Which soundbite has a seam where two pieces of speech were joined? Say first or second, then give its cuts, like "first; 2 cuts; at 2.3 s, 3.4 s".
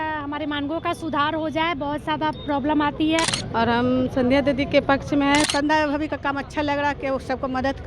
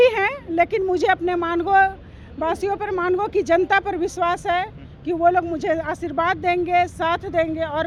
first; 2 cuts; at 3.3 s, 5.5 s